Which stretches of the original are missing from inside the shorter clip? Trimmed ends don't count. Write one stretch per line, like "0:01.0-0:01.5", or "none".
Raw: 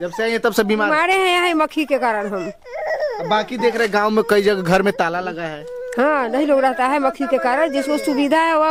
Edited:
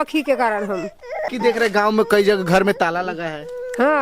0:02.9-0:03.5